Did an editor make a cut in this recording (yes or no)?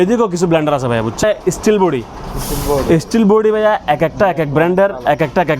yes